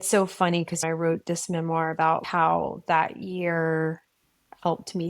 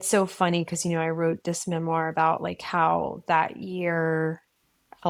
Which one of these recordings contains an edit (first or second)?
first